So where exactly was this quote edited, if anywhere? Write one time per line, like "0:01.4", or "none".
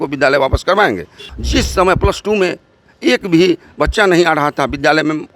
0:01.3